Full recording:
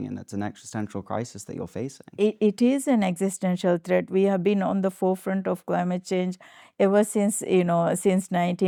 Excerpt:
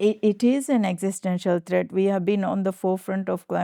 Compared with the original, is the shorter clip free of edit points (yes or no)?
yes